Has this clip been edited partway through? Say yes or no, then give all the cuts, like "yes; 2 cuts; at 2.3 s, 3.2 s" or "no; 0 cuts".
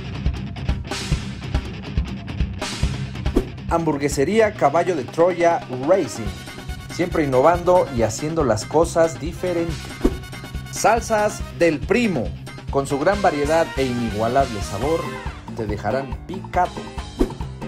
no; 0 cuts